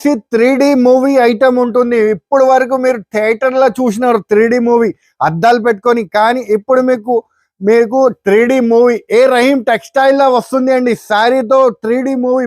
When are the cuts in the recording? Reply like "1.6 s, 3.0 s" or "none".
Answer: none